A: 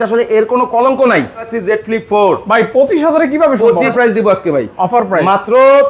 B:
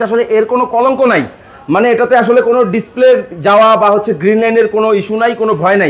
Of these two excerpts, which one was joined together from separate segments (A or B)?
A